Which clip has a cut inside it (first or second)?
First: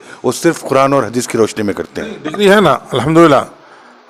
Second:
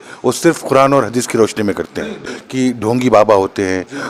second